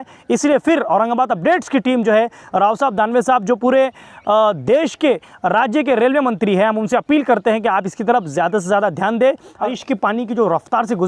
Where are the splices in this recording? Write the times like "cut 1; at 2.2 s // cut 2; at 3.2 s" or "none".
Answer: cut 1; at 9.7 s